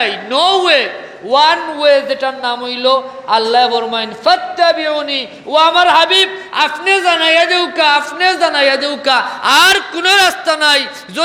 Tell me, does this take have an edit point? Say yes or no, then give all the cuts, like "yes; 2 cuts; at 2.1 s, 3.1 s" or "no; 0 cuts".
no; 0 cuts